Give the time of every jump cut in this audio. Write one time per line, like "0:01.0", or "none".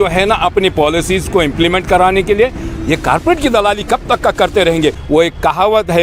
0:05.0